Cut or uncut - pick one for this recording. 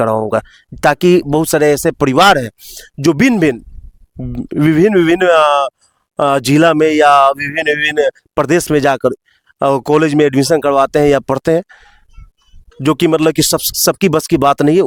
uncut